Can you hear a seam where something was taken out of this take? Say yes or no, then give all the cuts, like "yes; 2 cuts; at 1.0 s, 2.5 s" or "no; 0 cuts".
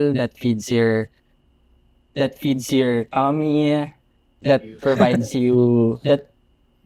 no; 0 cuts